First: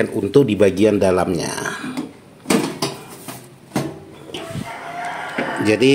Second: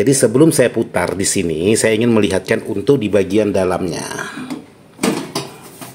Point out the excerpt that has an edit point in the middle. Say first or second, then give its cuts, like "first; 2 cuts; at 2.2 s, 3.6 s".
first; 1 cut; at 4.4 s